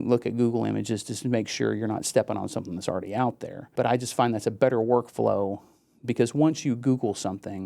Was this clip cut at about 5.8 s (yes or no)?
no